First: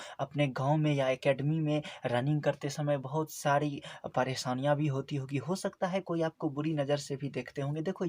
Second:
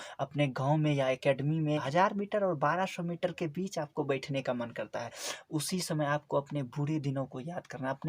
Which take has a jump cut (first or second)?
second